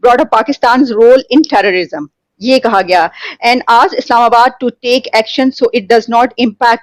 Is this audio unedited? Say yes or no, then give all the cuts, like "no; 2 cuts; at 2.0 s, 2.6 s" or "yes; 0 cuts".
yes; 0 cuts